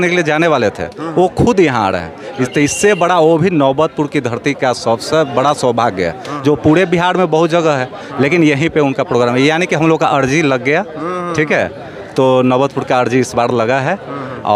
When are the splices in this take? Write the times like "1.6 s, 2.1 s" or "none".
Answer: none